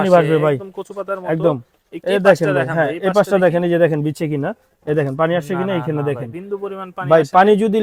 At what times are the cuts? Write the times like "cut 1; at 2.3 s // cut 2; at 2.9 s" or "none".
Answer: none